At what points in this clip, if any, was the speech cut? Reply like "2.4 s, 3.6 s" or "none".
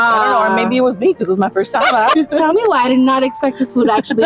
2.1 s